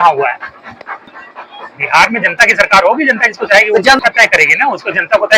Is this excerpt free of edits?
no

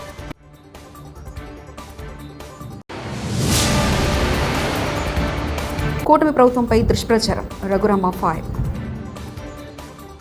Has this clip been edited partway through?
yes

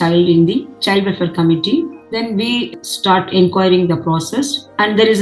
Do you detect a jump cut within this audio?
no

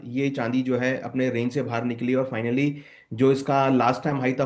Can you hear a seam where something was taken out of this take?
no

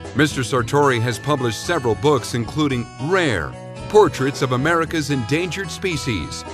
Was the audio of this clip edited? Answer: yes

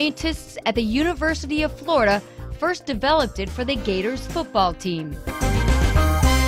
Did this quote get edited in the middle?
yes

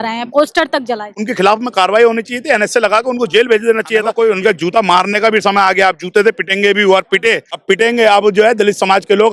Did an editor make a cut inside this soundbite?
yes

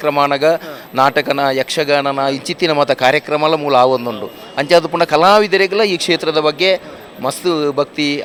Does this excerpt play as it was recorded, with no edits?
yes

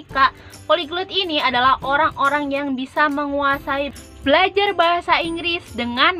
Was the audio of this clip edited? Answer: yes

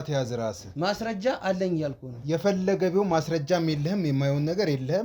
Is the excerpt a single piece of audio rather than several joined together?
yes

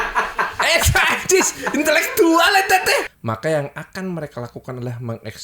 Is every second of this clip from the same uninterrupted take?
no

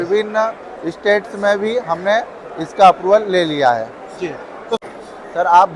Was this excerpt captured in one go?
no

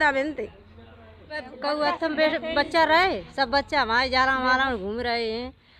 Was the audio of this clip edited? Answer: yes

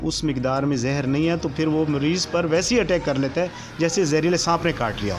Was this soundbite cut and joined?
no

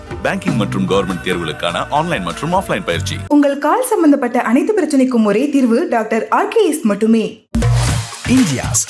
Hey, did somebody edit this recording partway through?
yes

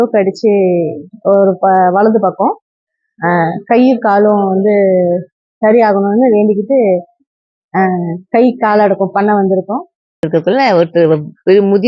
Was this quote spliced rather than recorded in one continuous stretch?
yes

